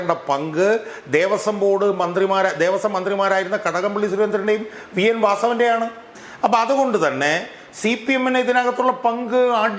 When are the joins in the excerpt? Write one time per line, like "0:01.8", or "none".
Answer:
0:06.1